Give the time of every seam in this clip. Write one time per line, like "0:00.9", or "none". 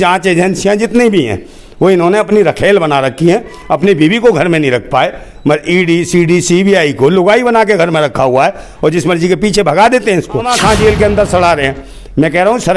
0:10.5